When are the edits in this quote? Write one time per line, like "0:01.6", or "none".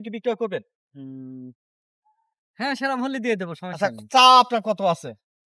none